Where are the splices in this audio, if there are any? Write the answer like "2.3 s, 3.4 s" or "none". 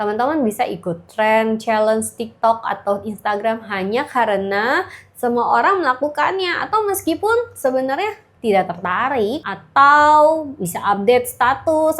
8.3 s, 9.5 s

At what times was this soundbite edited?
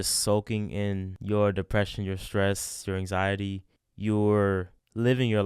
1.1 s

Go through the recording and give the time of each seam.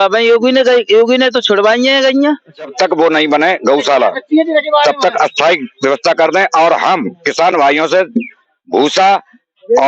2.7 s

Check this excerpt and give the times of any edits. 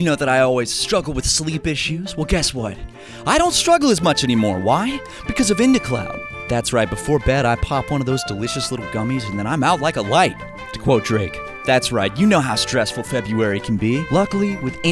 11.5 s

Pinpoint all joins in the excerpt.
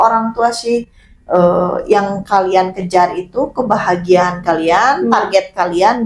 none

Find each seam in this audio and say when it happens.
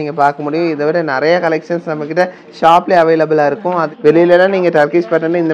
3.9 s

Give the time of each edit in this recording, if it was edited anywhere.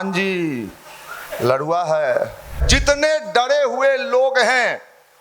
2.7 s

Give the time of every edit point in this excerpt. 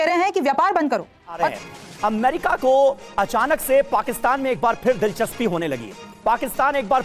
1.4 s

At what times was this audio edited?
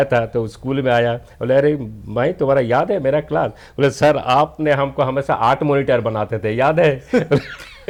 none

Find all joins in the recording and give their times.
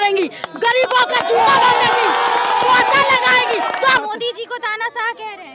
4.0 s

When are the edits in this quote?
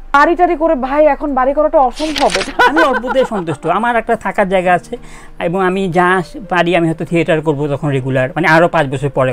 2.8 s

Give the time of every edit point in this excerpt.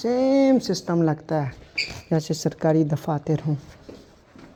none

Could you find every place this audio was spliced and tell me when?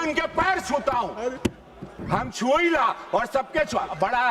2.0 s

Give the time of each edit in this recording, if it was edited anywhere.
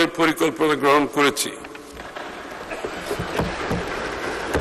none

